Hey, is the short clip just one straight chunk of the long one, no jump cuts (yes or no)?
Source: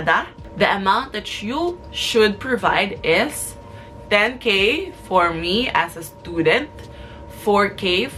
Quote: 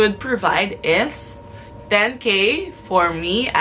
yes